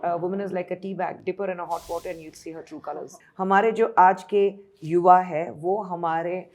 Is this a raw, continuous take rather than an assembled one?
no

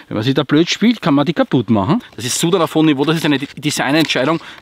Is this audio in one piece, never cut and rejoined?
no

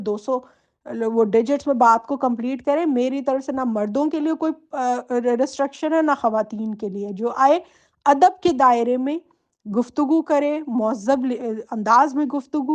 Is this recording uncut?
yes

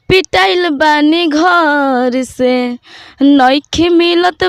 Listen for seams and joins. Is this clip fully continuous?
yes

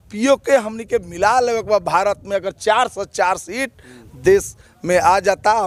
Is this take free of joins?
yes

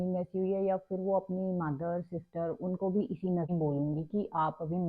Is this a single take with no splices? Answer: no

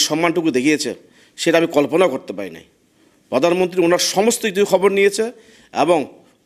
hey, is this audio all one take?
yes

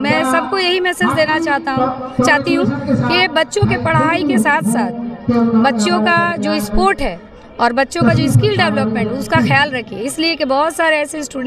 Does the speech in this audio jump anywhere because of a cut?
no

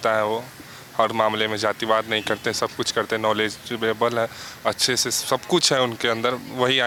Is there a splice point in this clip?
no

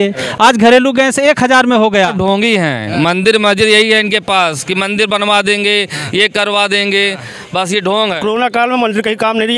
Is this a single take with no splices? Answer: no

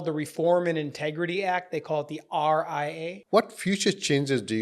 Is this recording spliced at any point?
yes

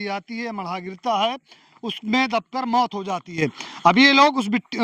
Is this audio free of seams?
yes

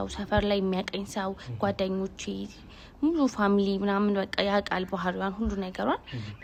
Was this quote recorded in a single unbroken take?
yes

